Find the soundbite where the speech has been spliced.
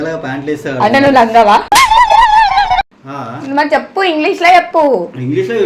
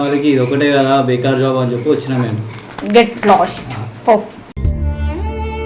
first; 1 cut; at 3.0 s

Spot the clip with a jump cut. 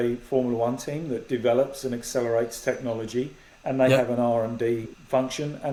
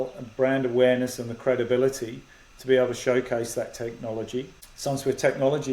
second; 1 cut; at 4.6 s

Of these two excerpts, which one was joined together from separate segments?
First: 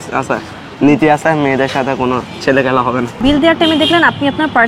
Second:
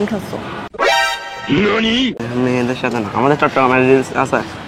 first; 1 cut; at 3.2 s

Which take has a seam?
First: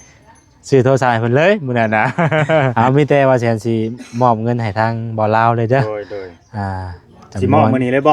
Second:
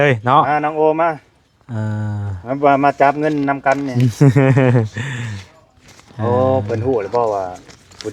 first; 1 cut; at 2.7 s

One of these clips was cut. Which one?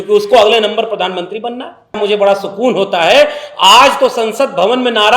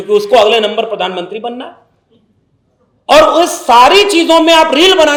first; 1 cut; at 2.0 s

